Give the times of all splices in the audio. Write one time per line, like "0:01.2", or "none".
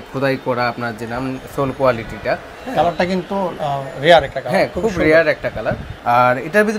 0:05.9